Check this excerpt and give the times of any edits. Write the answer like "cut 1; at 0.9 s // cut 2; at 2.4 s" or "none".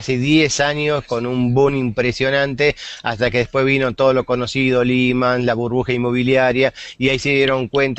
none